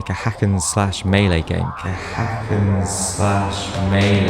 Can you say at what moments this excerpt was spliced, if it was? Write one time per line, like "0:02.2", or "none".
0:01.7

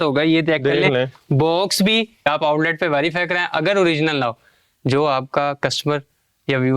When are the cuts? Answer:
0:02.3

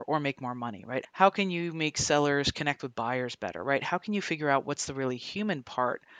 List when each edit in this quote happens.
0:01.1

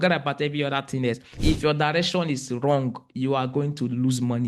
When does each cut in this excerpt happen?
0:01.3

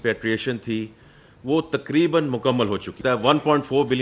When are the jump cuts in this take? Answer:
0:02.9

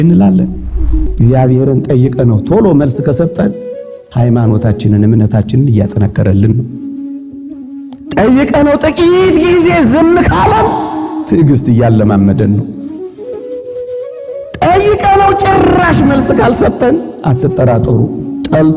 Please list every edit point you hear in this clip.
0:01.1

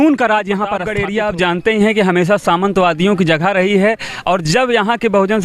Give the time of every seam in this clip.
0:01.0

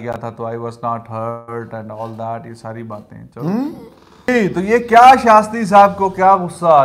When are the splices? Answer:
0:04.1

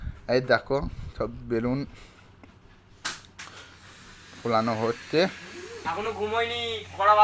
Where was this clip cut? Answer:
0:05.8

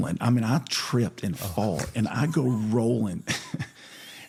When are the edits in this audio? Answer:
none

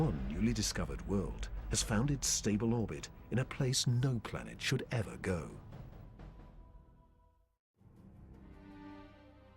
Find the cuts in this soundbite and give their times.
0:06.2

